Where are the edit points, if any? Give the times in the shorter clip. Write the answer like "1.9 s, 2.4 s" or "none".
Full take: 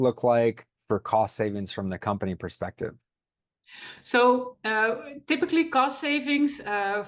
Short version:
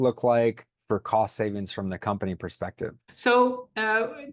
3.1 s

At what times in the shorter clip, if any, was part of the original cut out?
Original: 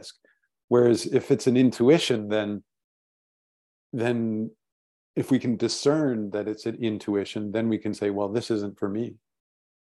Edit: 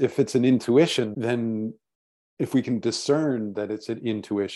1.1 s

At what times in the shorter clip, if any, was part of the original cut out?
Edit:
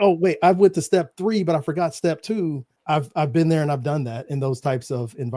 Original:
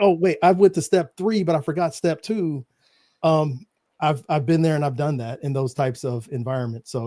2.7 s

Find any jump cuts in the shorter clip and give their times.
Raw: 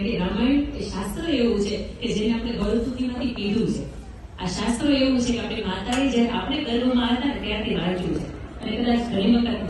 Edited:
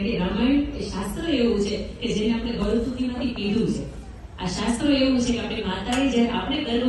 none

